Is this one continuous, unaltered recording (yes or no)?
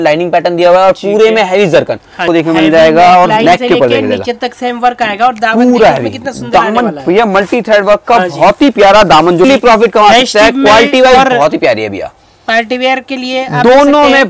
no